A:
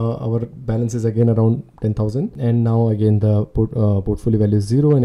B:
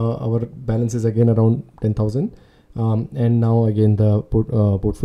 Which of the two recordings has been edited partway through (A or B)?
A